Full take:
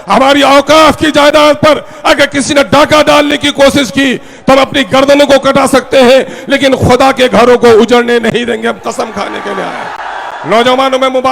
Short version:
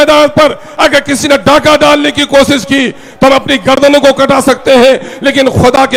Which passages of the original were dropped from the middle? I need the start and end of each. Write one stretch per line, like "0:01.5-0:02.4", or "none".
none